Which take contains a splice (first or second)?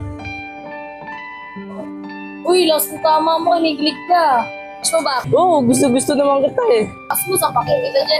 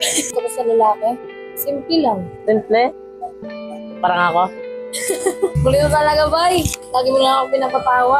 first